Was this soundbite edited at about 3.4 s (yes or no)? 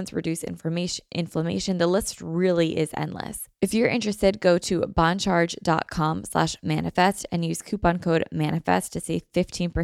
yes